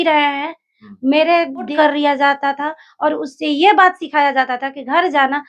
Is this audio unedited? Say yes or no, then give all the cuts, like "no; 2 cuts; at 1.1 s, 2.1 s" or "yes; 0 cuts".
no; 1 cut; at 1.7 s